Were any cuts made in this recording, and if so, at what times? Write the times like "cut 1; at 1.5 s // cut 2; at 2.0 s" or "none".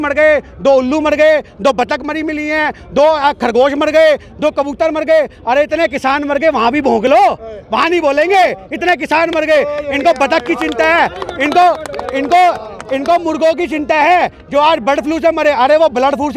none